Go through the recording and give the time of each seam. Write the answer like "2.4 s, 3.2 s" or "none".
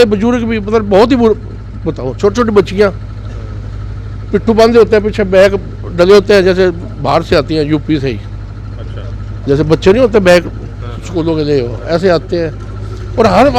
none